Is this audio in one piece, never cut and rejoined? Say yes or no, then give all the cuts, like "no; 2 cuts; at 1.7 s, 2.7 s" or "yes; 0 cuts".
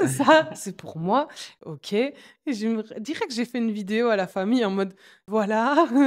yes; 0 cuts